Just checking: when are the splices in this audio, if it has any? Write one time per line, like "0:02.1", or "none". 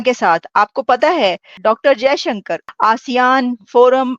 0:01.5
0:02.6